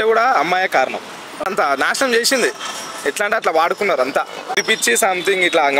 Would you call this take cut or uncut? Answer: cut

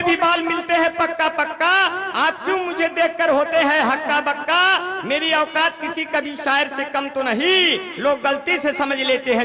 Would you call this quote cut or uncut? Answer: uncut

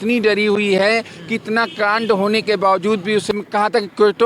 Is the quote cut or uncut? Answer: cut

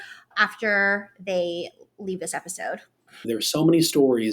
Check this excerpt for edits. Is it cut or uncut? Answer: cut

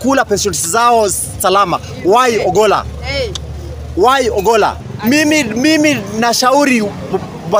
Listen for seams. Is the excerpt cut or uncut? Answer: cut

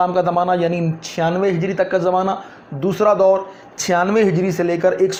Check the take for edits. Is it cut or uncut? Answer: uncut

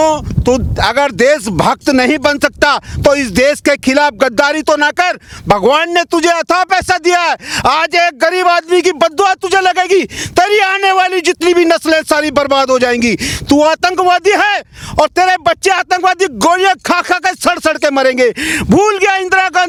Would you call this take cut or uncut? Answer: uncut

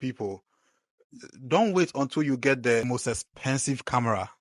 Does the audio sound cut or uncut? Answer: cut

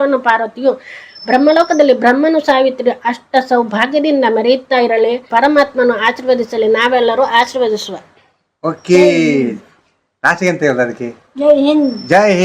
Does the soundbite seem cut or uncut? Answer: uncut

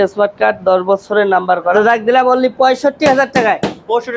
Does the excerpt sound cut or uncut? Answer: cut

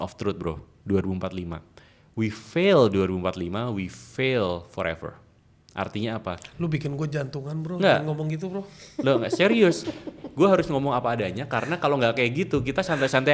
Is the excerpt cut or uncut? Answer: uncut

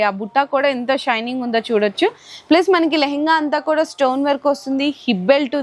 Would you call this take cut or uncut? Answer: uncut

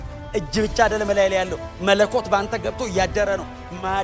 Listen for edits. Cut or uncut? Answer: uncut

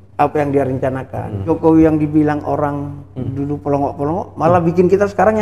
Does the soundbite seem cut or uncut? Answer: cut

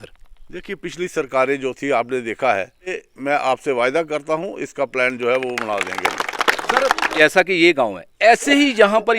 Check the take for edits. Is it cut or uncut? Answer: cut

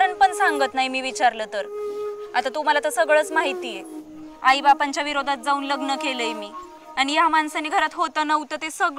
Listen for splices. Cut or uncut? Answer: uncut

